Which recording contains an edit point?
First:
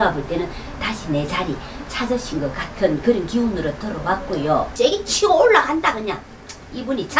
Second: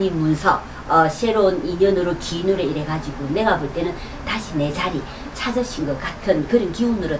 first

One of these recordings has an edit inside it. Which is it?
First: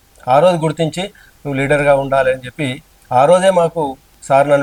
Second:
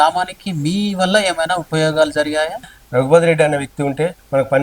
second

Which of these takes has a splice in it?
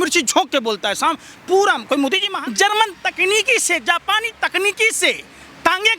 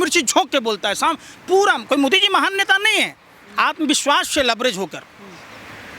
first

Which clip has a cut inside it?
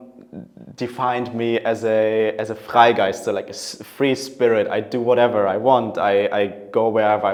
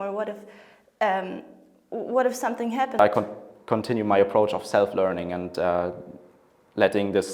second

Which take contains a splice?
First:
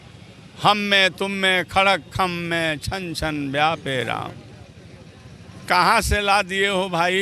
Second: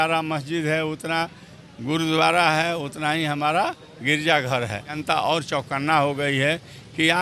second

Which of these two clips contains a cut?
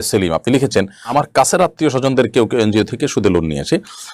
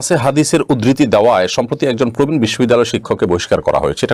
first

